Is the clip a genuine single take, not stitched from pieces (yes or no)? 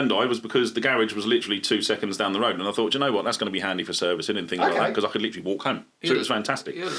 yes